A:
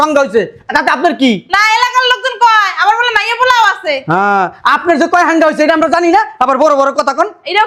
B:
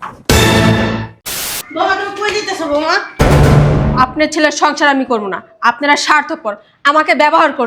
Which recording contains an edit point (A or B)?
B